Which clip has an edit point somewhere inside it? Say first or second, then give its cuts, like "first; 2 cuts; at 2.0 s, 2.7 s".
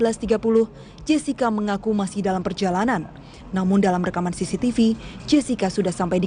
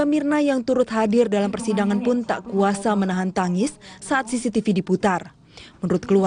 first; 1 cut; at 2.0 s